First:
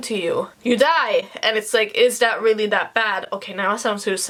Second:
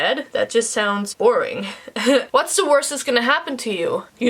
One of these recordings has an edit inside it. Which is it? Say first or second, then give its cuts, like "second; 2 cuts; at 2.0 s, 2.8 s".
second; 2 cuts; at 1.1 s, 2.3 s